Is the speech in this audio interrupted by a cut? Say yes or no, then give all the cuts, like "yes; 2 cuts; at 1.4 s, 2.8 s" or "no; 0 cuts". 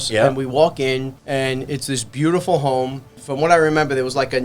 yes; 2 cuts; at 1.2 s, 3.2 s